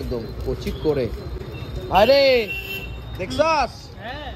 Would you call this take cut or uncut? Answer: uncut